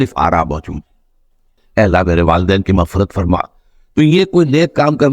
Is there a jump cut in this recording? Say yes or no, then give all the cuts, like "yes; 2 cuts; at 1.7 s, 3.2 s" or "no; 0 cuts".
yes; 1 cut; at 1.5 s